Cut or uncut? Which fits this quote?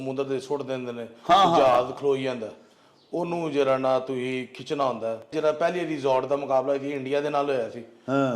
cut